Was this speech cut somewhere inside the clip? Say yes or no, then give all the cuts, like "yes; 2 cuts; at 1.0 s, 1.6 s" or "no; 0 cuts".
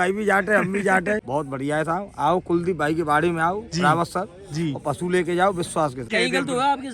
yes; 2 cuts; at 1.2 s, 6.0 s